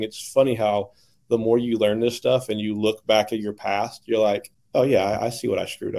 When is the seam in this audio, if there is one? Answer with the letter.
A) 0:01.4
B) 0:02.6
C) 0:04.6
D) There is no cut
C